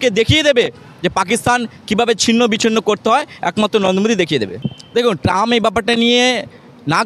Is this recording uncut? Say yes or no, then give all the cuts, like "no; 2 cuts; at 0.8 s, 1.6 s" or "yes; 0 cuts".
yes; 0 cuts